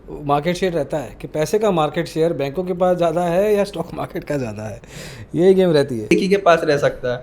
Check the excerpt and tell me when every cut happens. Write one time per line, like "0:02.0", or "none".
none